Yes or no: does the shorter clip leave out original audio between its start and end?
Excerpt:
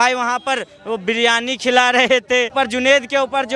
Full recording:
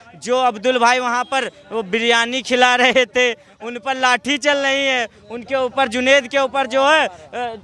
yes